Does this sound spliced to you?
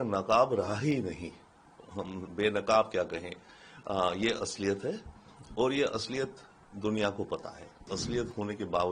yes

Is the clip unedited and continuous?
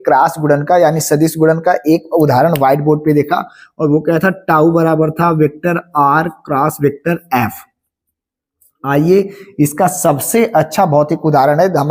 yes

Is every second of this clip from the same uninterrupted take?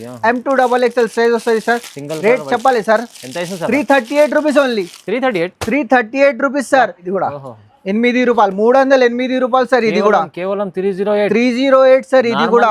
no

